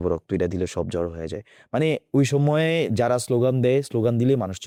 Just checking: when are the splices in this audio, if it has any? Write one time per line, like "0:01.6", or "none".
none

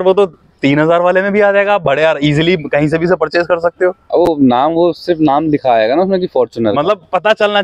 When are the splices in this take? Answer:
none

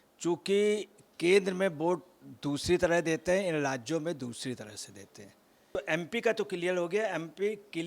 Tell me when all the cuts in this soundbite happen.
0:05.8

